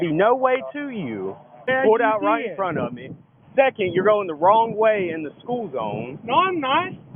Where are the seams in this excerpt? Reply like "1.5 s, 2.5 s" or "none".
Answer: 1.7 s

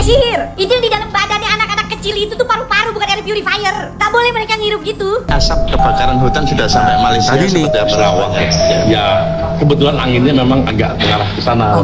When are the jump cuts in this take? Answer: 5.2 s

